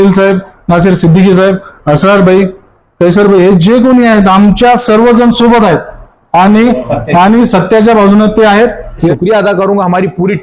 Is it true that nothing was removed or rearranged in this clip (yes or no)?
no